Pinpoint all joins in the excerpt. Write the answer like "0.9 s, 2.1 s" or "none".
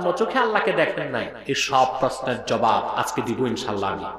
1.3 s